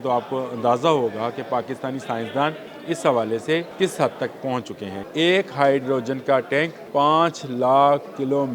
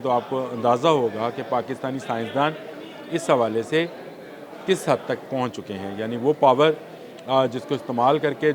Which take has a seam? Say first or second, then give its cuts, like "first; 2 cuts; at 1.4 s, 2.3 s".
first; 4 cuts; at 2.7 s, 3.7 s, 4.9 s, 6.8 s